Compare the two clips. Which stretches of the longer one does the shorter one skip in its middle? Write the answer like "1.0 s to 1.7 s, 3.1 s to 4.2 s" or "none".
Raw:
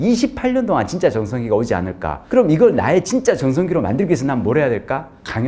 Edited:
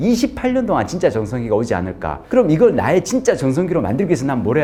none